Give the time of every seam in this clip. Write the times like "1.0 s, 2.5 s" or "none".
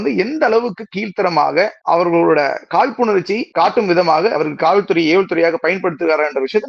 1.8 s, 3.5 s, 4.4 s